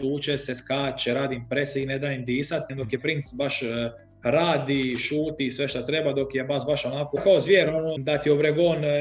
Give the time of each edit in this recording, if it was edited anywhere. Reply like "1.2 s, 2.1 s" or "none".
2.8 s, 7.2 s, 8.0 s